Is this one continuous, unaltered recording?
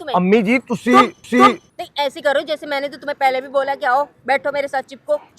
no; 1 cut; at 1.6 s

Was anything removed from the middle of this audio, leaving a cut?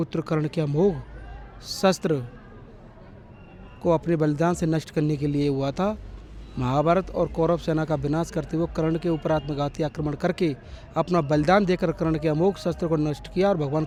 no; 0 cuts

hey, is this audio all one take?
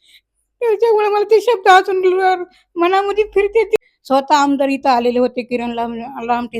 no; 1 cut; at 3.8 s

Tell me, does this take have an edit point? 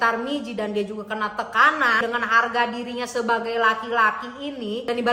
no; 0 cuts

